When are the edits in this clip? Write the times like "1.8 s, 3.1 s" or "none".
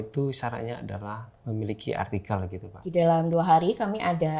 2.9 s